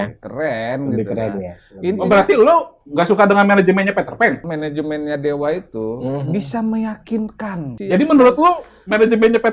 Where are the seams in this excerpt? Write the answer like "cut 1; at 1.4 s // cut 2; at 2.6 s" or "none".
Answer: cut 1; at 4.4 s // cut 2; at 7.7 s